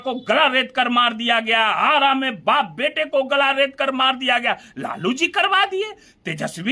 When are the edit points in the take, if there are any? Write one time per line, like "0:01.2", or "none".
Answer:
none